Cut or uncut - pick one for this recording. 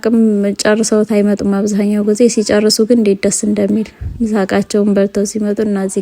uncut